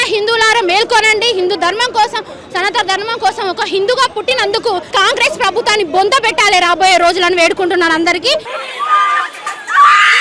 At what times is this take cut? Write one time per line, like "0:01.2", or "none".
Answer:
0:04.9
0:08.5